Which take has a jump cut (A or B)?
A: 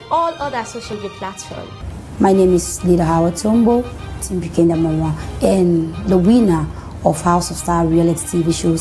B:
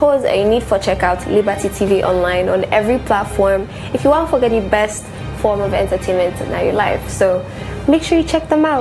A